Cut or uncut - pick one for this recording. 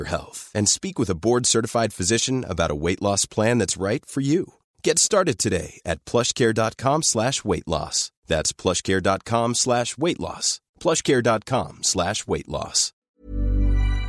cut